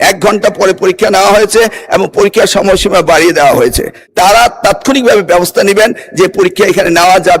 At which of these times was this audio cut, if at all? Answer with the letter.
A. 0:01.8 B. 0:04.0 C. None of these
B